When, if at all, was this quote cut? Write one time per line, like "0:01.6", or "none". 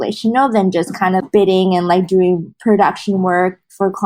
0:01.2
0:02.5